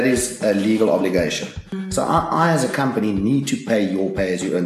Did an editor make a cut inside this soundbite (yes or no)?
yes